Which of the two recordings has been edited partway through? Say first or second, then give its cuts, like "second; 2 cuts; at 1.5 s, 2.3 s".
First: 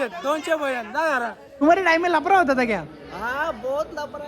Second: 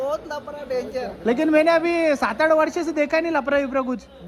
first; 1 cut; at 1.6 s